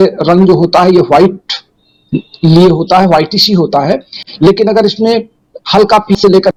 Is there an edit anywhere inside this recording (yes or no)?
no